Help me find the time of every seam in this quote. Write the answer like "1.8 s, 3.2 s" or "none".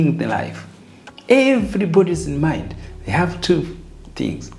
none

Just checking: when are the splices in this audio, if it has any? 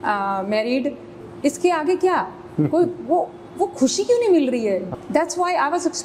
1.1 s, 4.9 s

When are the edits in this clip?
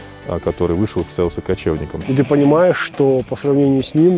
1.9 s

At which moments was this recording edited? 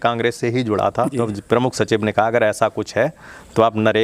1.2 s

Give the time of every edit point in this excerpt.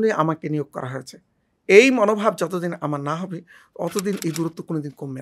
none

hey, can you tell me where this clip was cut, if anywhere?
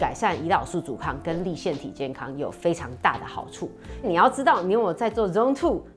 4.1 s

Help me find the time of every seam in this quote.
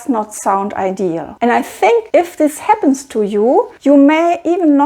1.3 s, 2.1 s, 3.7 s

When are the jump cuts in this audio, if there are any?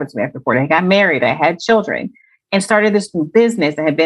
none

